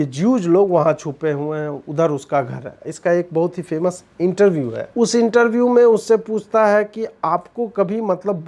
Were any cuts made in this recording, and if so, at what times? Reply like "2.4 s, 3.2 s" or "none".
4.8 s